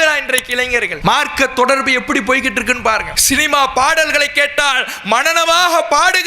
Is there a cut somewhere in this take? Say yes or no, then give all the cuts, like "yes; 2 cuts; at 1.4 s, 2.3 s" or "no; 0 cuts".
yes; 2 cuts; at 0.9 s, 3.1 s